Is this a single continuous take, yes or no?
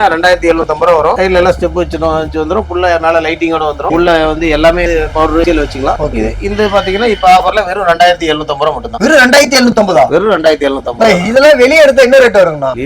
yes